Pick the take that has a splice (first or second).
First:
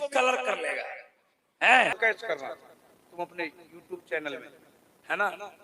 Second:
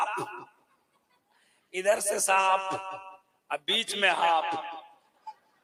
first